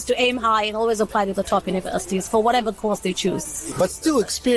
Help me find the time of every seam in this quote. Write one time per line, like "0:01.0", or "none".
0:03.5